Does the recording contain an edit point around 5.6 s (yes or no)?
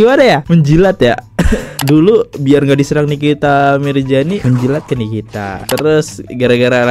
yes